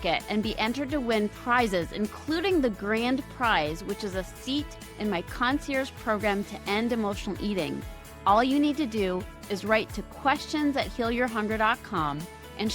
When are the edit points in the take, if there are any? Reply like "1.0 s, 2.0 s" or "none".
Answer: none